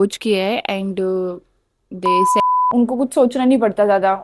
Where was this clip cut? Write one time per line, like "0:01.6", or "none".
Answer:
0:02.4